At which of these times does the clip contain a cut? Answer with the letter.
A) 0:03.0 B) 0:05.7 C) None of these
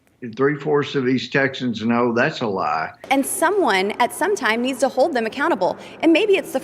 A